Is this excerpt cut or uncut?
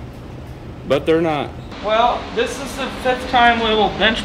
cut